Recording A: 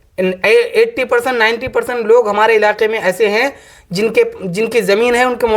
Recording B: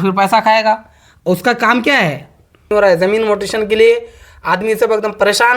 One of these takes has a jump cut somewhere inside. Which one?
B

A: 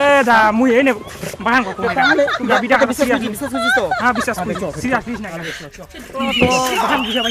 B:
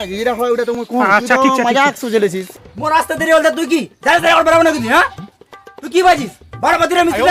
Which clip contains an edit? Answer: B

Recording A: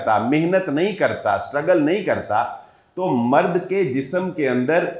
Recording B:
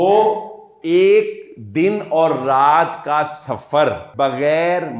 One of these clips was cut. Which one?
B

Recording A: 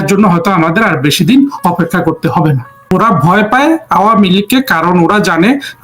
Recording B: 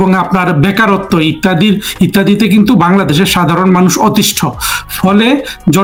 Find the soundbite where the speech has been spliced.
A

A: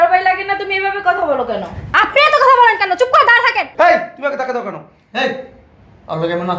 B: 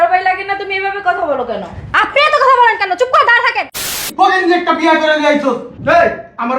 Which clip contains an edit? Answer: B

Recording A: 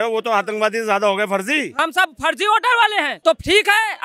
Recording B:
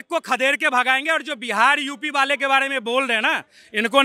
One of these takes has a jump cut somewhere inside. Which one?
A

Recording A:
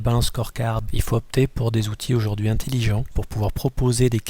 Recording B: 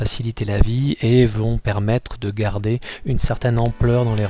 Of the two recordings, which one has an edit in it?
A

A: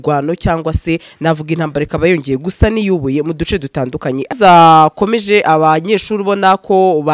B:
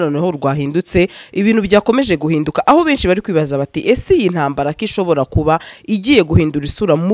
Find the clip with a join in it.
A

